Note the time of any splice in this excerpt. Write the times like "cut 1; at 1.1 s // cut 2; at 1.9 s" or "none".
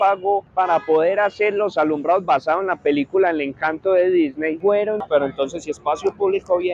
cut 1; at 5.0 s